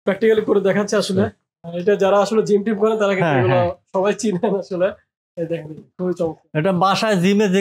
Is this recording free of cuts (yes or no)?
no